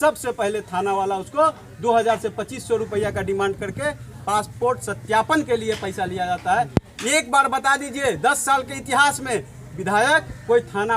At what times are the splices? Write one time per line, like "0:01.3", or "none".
none